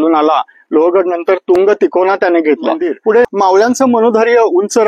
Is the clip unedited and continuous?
no; 1 cut; at 3.2 s

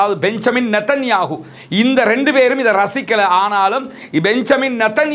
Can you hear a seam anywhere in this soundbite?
no; 0 cuts

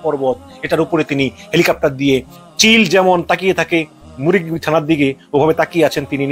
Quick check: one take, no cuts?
no; 1 cut; at 2.4 s

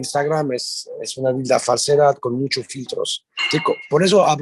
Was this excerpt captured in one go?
yes; 0 cuts

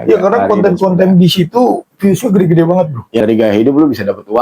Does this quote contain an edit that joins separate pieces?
yes; 1 cut; at 3.2 s

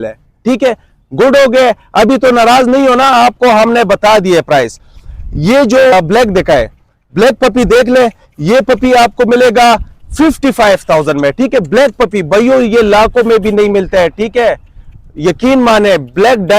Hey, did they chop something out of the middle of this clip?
yes; 1 cut; at 5.9 s

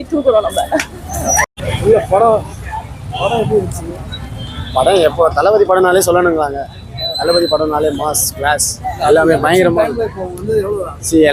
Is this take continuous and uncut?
no; 1 cut; at 1.5 s

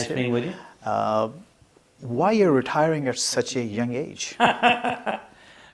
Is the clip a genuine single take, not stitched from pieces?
no; 1 cut; at 4.5 s

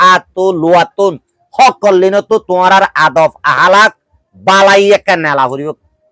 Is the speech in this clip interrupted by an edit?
no; 0 cuts

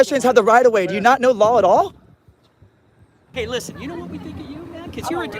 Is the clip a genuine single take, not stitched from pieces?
no; 1 cut; at 3.2 s

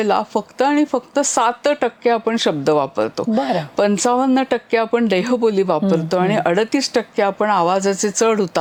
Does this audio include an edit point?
no; 0 cuts

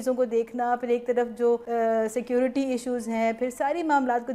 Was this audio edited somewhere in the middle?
yes; 1 cut; at 1.7 s

